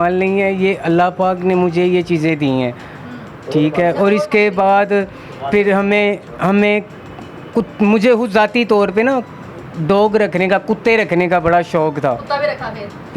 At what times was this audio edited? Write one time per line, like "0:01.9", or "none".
none